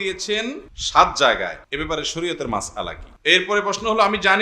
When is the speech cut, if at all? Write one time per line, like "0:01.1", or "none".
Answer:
0:03.0